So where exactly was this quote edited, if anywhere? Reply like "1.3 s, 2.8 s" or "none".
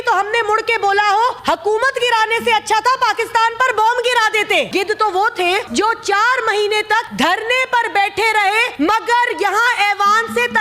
1.4 s, 4.7 s, 5.7 s, 7.1 s, 8.7 s